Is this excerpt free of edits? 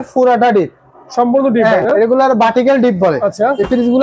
yes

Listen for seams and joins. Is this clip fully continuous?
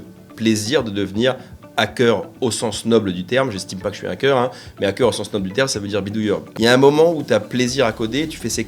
no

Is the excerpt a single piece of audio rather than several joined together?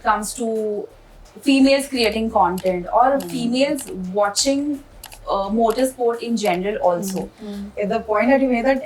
no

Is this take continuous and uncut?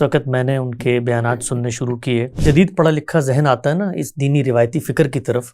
no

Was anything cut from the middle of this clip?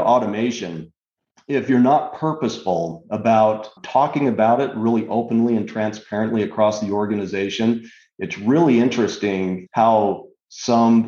no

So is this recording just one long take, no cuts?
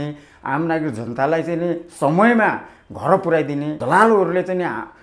no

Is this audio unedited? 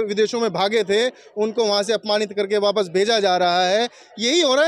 yes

